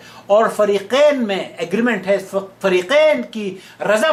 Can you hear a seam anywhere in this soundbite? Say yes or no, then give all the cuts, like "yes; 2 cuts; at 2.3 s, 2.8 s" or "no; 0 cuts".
no; 0 cuts